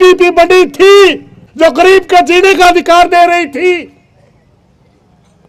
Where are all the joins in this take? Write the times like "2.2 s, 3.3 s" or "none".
1.4 s